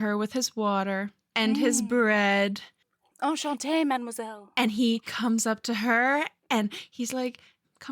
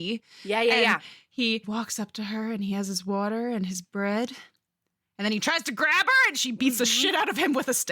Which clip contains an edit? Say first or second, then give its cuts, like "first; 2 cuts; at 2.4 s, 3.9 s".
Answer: second; 1 cut; at 1.7 s